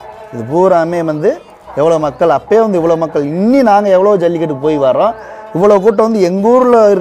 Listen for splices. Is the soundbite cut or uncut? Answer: uncut